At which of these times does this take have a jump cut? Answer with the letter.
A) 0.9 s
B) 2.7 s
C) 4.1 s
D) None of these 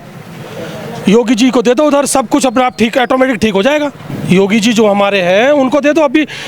C